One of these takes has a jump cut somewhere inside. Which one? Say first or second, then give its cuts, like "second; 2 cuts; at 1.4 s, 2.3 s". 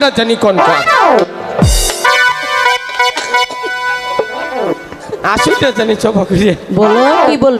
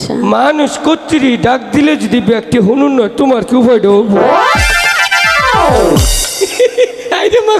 first; 1 cut; at 4.6 s